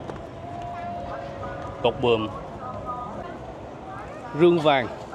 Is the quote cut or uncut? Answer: cut